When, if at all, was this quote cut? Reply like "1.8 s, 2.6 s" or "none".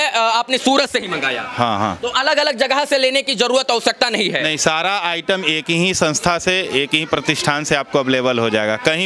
none